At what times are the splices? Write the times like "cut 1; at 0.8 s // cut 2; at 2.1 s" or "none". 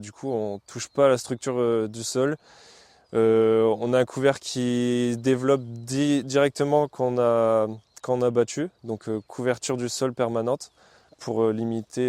none